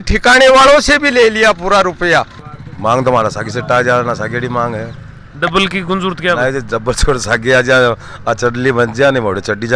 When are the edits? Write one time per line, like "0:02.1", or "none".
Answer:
0:02.4